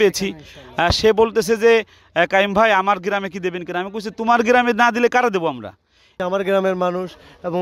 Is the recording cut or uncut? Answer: cut